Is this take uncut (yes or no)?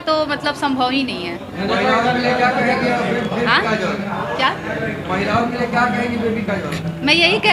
yes